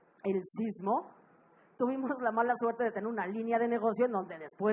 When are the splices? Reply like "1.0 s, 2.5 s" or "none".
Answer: 1.6 s